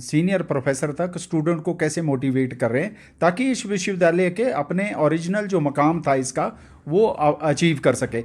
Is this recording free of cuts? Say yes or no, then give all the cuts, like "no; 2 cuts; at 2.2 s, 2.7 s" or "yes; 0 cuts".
yes; 0 cuts